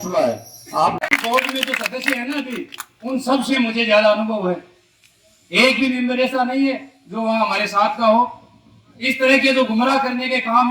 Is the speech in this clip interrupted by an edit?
yes; 1 cut; at 1.0 s

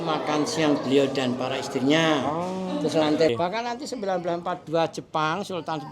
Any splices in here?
yes; 1 cut; at 3.3 s

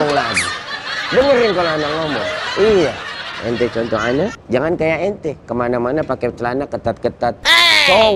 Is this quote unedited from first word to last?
yes; 0 cuts

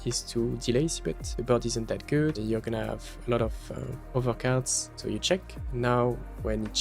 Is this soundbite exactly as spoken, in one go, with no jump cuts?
no; 4 cuts; at 1.3 s, 2.4 s, 3.9 s, 4.8 s

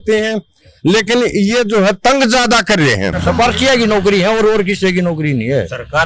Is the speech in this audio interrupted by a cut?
yes; 1 cut; at 3.2 s

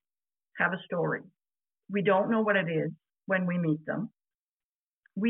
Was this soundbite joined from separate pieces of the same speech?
no; 0 cuts

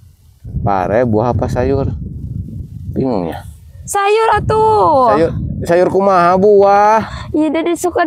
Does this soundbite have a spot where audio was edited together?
no; 0 cuts

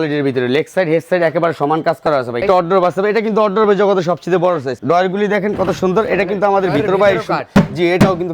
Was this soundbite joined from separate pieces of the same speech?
yes; 2 cuts; at 2.4 s, 4.8 s

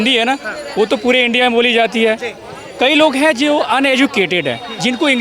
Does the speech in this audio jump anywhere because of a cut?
no; 0 cuts

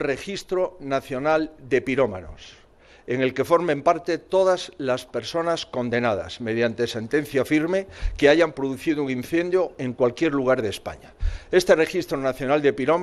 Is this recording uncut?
yes; 0 cuts

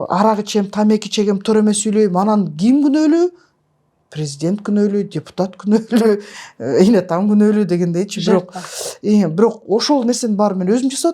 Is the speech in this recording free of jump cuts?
yes; 0 cuts

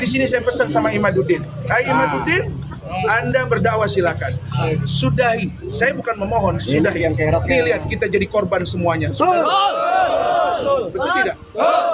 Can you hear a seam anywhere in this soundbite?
no; 0 cuts

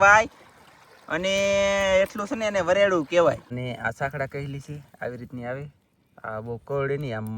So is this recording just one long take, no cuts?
no; 1 cut; at 3.5 s

